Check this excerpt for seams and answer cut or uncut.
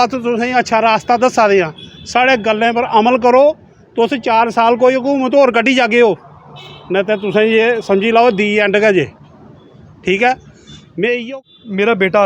cut